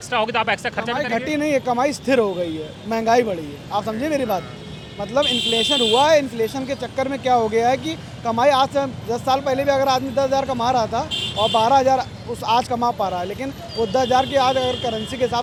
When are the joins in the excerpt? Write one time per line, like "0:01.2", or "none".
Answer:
none